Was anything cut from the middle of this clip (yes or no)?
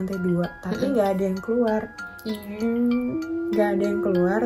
no